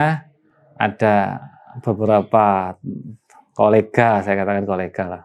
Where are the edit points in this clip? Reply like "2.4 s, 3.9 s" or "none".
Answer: none